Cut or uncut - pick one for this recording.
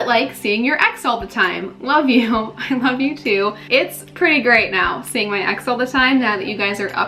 uncut